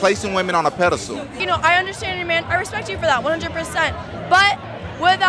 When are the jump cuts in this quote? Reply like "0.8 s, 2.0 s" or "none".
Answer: 1.4 s